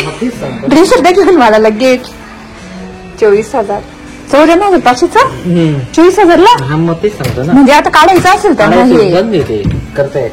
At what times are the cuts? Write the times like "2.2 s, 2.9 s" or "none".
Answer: none